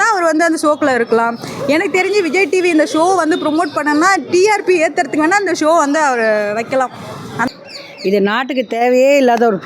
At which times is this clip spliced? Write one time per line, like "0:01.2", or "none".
0:07.5